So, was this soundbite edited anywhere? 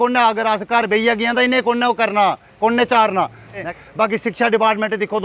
yes; 1 cut; at 3.7 s

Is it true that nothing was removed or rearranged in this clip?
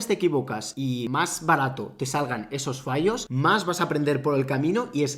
no; 2 cuts; at 0.9 s, 3.3 s

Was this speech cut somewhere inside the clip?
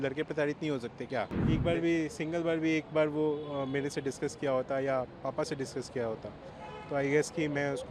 yes; 1 cut; at 1.4 s

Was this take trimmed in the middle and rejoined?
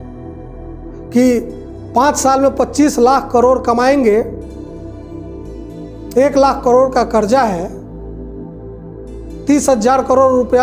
no; 0 cuts

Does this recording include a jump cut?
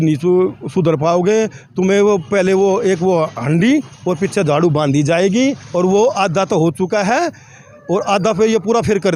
no; 0 cuts

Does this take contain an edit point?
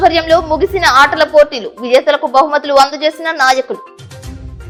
no; 0 cuts

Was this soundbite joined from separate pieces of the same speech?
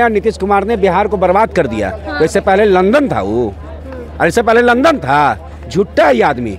no; 0 cuts

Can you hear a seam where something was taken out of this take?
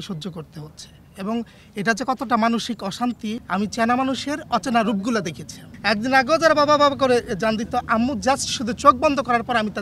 yes; 2 cuts; at 3.4 s, 5.7 s

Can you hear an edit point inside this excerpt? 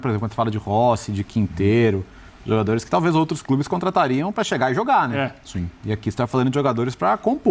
no; 0 cuts

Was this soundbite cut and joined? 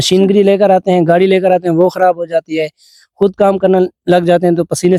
no; 0 cuts

